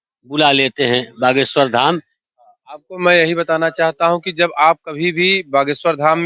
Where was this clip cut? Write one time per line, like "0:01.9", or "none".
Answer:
0:02.2